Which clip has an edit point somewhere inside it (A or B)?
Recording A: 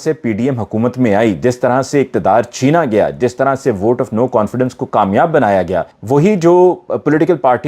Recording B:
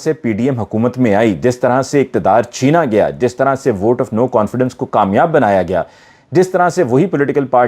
A